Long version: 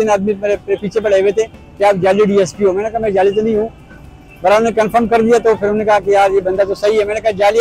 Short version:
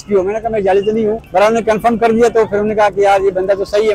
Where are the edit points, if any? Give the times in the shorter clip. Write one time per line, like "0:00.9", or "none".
0:01.2